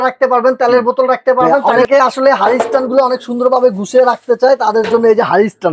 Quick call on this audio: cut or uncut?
cut